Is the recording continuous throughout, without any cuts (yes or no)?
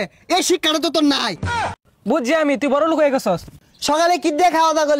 no